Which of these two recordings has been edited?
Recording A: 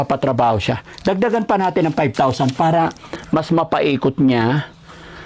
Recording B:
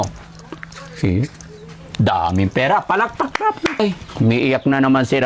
B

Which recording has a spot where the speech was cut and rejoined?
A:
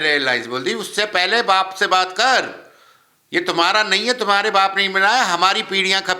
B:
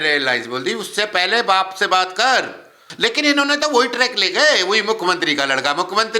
B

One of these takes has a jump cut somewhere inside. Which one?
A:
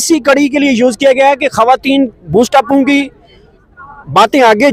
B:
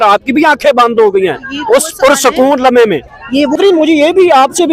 B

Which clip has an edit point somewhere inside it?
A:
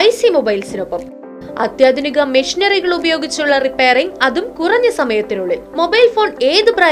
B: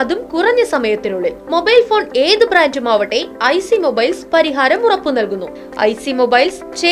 B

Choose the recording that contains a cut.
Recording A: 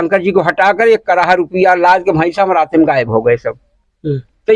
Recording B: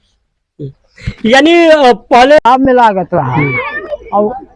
B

